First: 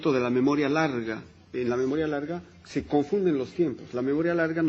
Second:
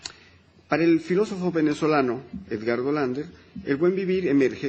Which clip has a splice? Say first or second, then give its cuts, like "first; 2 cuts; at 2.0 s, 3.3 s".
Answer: first; 1 cut; at 1.8 s